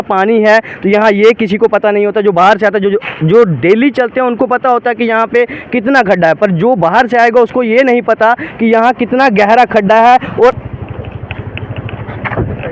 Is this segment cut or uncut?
cut